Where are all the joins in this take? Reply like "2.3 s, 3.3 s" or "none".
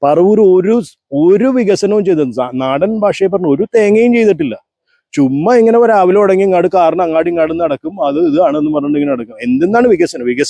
none